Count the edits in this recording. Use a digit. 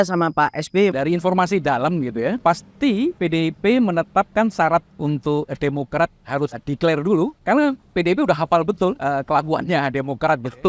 6